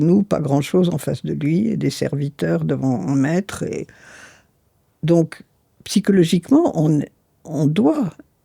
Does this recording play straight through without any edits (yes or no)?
yes